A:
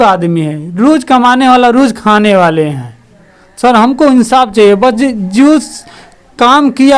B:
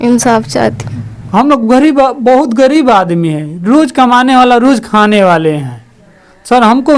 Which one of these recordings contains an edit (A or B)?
B